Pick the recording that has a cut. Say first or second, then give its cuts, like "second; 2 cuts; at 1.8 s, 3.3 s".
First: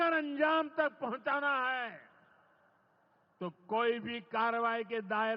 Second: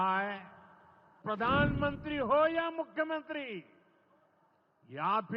second; 1 cut; at 1.2 s